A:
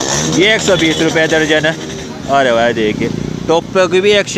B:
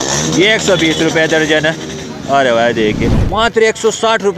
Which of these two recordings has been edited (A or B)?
B